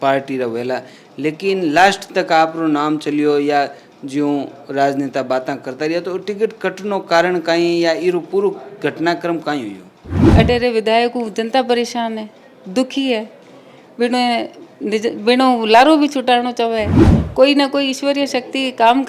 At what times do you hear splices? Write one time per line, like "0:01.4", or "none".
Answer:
0:10.3
0:17.0